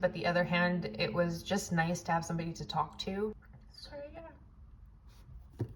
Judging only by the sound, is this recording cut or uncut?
cut